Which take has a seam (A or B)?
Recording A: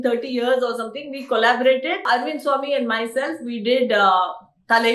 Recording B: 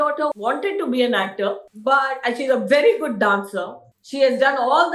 A